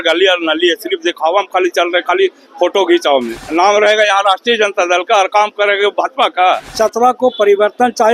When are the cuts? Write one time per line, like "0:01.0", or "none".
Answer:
0:03.4
0:06.7